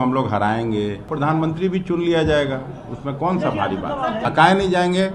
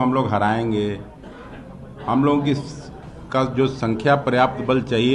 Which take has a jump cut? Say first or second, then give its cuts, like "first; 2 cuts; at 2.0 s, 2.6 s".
first; 2 cuts; at 1.0 s, 4.2 s